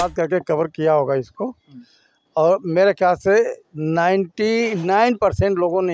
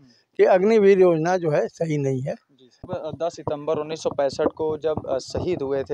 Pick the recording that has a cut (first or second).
second